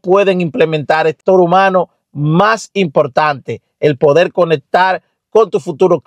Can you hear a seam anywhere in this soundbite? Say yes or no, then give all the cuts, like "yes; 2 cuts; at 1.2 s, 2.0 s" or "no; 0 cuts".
yes; 1 cut; at 1.2 s